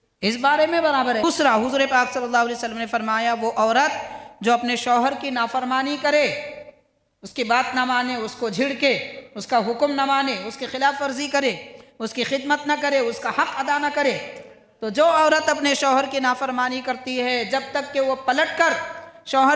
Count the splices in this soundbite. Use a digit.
1